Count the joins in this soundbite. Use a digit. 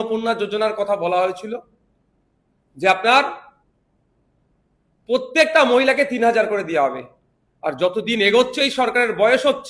0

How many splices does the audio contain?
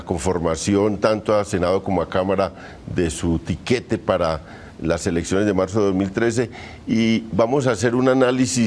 0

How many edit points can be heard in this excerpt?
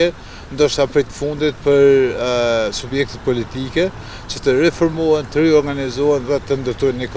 0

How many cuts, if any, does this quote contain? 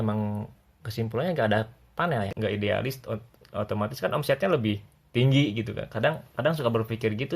1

